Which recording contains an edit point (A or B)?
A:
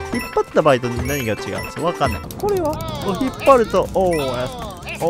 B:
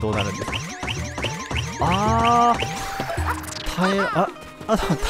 A